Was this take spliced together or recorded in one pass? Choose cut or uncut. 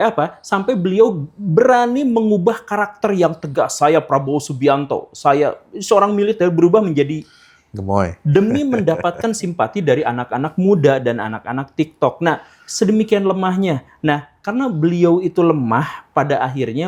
uncut